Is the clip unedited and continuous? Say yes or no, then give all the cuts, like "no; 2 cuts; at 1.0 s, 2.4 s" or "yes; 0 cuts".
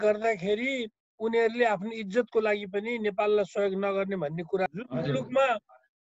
no; 1 cut; at 4.7 s